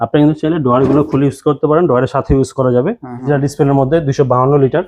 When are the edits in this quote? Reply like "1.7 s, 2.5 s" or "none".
3.1 s